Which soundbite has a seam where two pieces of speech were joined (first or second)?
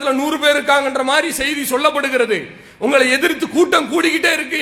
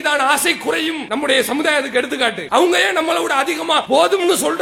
second